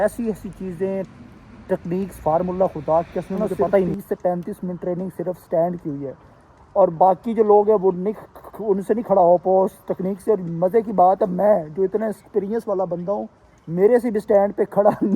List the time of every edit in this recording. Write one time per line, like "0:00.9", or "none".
0:04.0